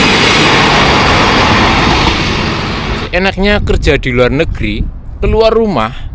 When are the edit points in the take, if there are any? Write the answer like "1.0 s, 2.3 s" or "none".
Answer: 3.0 s